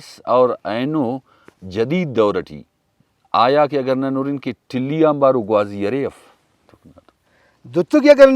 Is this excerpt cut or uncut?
cut